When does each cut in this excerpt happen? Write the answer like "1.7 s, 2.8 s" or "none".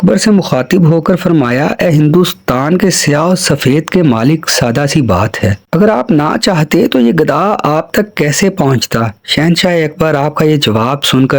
none